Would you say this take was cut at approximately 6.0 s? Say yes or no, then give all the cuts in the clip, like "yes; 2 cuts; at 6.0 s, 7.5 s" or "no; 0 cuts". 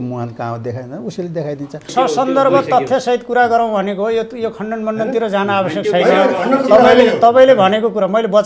no; 1 cut; at 1.9 s